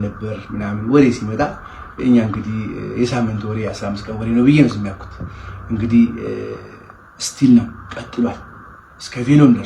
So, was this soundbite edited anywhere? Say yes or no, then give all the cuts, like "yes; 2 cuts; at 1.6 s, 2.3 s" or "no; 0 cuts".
no; 0 cuts